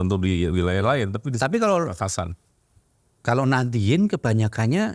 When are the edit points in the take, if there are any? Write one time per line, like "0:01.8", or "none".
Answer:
none